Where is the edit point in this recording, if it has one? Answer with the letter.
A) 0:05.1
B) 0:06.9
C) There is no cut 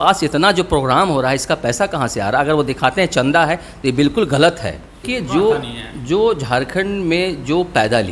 A